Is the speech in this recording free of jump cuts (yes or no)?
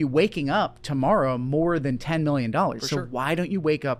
yes